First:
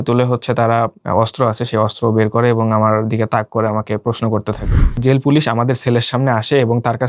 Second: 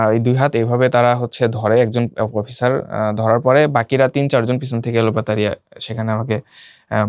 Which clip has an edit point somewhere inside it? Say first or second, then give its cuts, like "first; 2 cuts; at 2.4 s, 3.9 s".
first; 2 cuts; at 1.0 s, 5.0 s